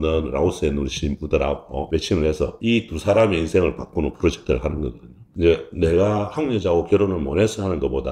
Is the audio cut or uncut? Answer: cut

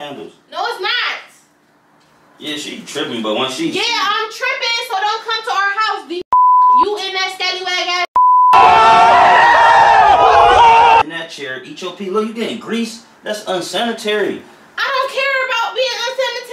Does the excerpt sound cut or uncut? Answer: cut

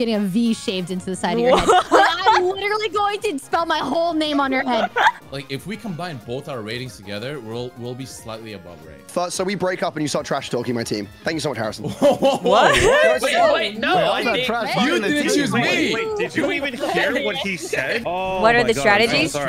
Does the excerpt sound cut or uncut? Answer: cut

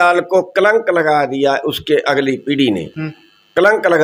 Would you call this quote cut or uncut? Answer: uncut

